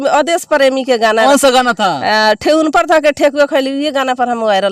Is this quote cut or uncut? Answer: cut